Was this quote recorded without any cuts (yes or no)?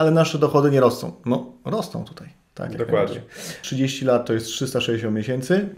no